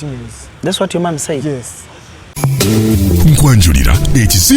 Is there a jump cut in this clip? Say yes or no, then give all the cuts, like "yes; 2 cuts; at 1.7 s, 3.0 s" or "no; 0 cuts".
yes; 1 cut; at 2.4 s